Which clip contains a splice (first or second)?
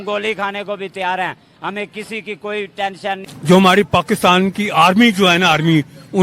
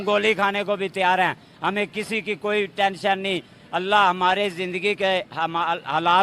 first